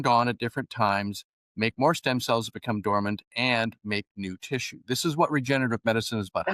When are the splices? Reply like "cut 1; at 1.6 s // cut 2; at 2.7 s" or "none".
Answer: none